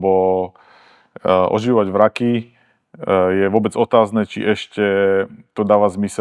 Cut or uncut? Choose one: uncut